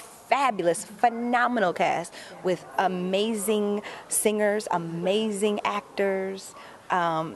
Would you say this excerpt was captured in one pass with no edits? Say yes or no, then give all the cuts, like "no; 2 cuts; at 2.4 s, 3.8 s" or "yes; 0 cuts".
yes; 0 cuts